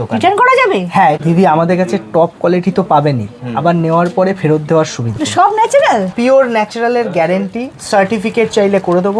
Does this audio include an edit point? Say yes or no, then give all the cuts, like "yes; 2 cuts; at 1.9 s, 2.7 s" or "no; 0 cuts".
yes; 2 cuts; at 1.2 s, 5.1 s